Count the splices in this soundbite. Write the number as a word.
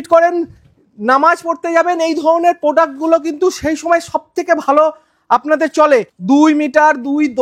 one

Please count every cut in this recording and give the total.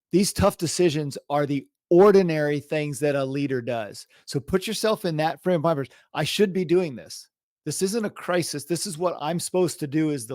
one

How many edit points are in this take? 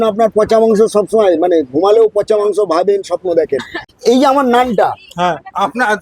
one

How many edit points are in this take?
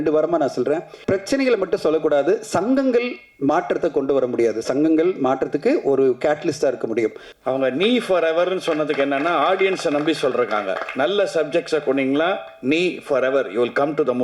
two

